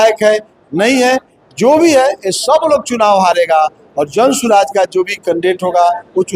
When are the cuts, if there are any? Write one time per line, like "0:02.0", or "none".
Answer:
none